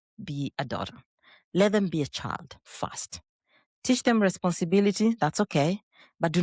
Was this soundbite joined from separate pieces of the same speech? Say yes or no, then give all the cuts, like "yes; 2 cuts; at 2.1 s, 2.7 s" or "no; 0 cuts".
no; 0 cuts